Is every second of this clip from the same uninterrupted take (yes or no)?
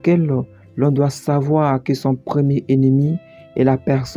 yes